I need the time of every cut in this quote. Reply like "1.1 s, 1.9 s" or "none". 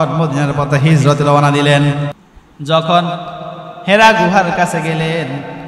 2.2 s